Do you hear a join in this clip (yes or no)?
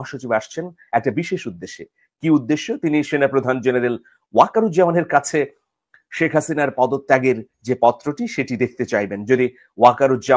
no